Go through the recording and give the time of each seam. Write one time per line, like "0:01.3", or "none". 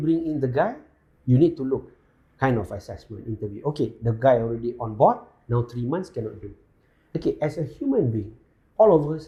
none